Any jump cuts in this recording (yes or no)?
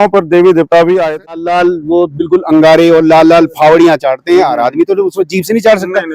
yes